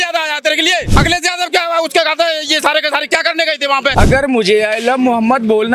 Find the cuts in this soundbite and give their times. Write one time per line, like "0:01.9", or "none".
0:00.9
0:03.9